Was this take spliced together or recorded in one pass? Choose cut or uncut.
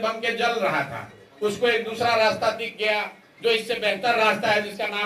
uncut